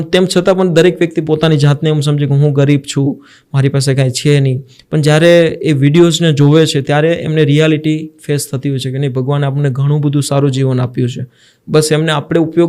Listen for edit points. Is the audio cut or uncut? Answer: uncut